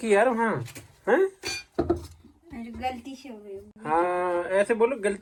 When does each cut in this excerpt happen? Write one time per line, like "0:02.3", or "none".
none